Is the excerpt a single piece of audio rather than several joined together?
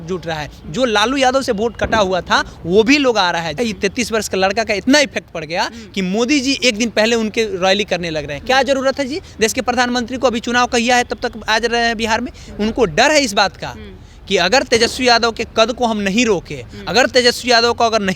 no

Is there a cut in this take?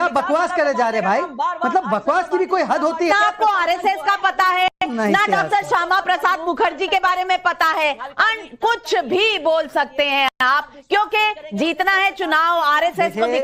yes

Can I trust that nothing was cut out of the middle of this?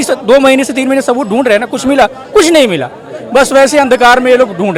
yes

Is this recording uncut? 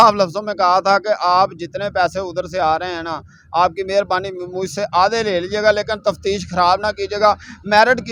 yes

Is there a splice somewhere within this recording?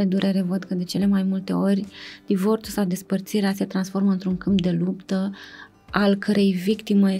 no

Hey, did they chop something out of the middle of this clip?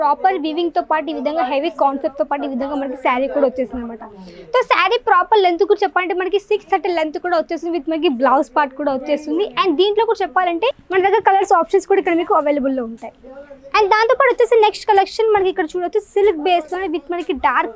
no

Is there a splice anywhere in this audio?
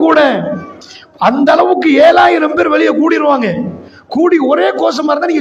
no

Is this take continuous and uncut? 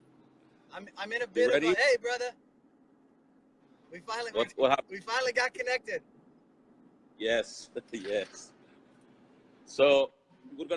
no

